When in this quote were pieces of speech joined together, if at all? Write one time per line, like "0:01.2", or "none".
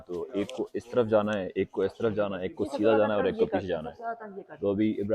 none